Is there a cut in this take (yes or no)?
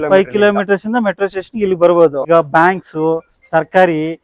yes